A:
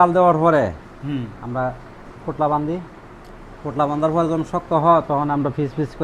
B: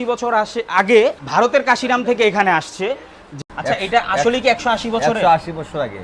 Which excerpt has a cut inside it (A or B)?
B